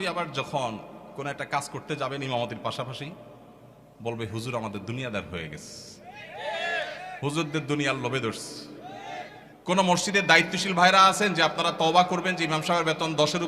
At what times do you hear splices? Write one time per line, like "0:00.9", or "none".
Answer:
0:09.4